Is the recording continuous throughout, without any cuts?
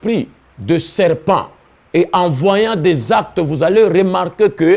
yes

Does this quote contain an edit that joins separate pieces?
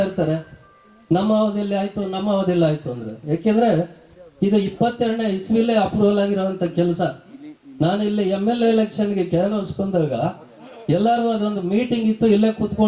no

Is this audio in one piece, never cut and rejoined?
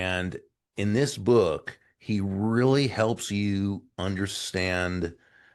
yes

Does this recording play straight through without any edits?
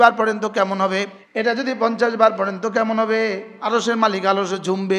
no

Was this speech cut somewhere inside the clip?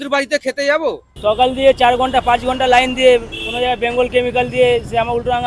yes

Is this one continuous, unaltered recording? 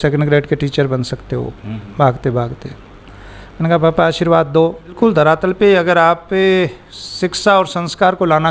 no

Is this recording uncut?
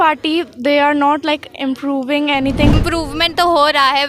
no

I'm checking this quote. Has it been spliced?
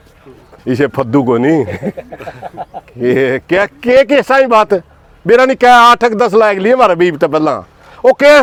no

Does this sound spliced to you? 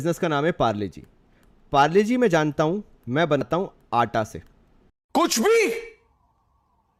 no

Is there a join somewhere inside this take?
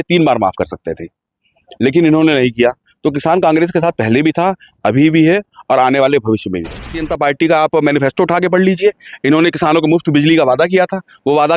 yes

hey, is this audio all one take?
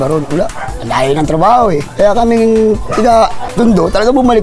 no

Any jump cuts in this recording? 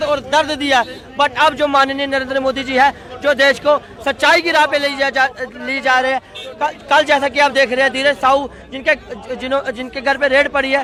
no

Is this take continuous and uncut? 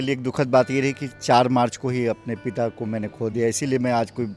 yes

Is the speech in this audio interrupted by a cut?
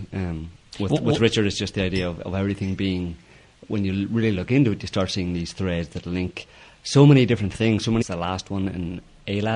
no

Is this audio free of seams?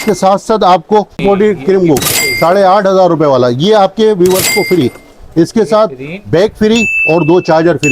no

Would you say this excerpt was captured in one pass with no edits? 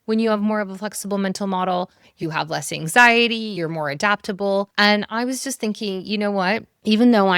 no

